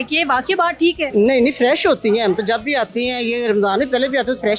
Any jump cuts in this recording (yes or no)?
no